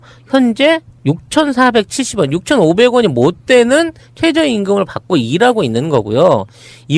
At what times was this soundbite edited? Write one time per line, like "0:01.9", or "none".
none

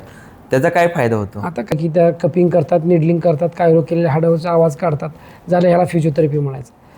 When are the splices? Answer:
0:01.8

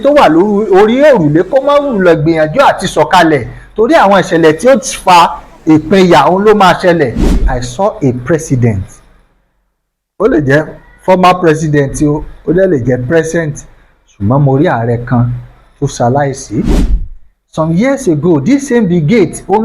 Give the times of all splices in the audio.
0:07.2
0:16.9

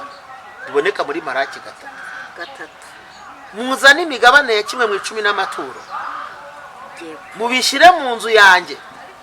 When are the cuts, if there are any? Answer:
none

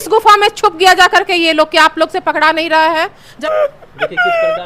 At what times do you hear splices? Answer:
0:03.3

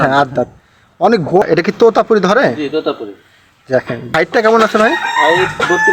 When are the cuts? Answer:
0:01.4
0:04.1

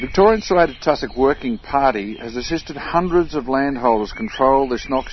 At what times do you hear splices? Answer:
none

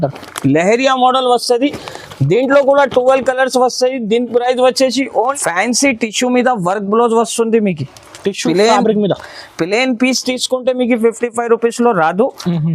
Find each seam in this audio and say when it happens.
0:05.3

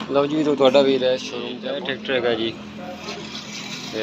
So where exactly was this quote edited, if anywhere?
0:01.5

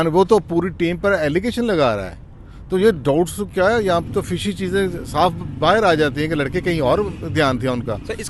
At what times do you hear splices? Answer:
none

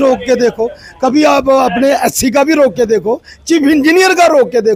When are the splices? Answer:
none

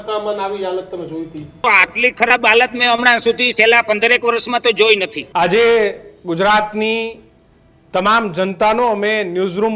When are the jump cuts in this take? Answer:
0:01.6
0:05.2

